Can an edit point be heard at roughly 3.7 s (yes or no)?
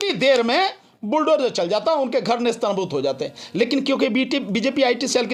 no